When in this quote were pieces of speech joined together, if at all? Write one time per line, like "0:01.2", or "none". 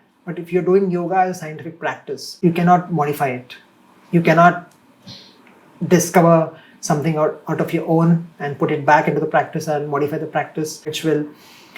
0:02.3
0:10.9